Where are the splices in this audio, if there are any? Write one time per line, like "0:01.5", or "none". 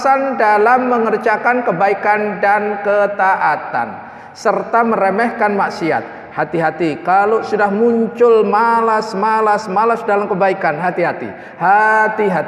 none